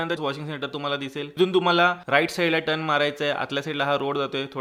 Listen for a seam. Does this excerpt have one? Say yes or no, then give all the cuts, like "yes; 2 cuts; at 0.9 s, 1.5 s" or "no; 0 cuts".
no; 0 cuts